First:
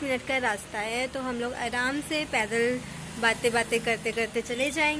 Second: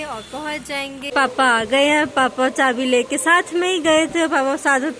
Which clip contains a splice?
second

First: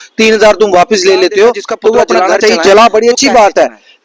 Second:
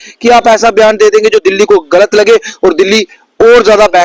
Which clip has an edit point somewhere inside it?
first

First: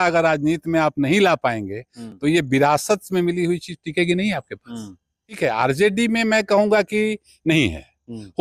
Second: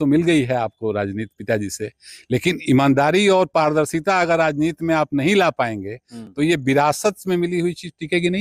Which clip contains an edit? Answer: first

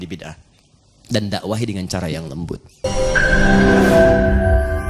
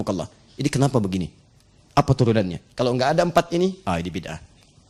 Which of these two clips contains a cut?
first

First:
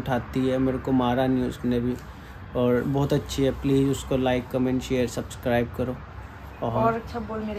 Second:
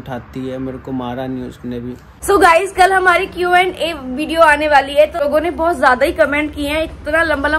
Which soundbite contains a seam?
second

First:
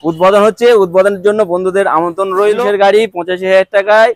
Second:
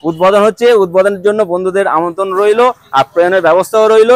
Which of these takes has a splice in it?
first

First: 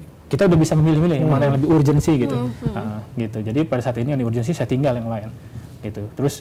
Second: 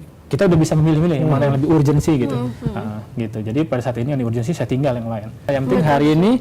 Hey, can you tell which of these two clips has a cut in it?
second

